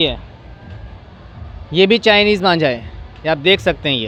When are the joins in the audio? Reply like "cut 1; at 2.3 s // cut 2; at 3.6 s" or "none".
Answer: none